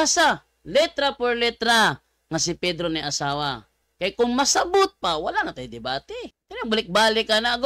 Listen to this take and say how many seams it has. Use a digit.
1